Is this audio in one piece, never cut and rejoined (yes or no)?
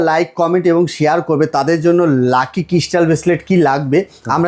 yes